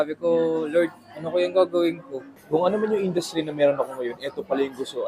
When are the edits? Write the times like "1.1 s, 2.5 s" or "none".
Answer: 2.4 s